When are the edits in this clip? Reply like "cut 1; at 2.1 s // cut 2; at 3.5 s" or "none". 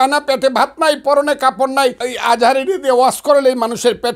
cut 1; at 2.1 s